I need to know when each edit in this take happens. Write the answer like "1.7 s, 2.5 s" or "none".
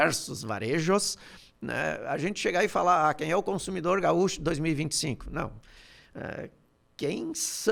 none